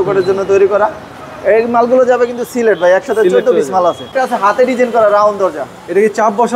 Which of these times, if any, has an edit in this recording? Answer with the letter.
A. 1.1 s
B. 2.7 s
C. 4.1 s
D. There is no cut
C